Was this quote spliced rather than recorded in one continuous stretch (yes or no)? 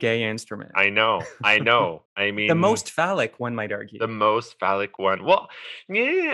yes